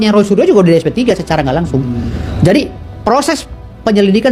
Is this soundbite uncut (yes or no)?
no